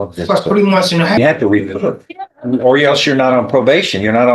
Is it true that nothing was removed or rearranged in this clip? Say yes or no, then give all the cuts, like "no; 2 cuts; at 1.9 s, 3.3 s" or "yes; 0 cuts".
no; 1 cut; at 1.2 s